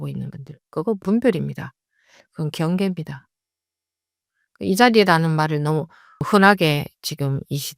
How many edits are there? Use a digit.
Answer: 1